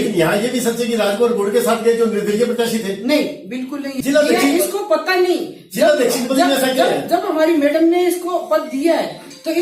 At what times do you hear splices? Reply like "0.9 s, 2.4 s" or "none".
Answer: 3.9 s